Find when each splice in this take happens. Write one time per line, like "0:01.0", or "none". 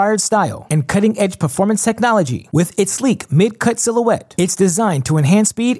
none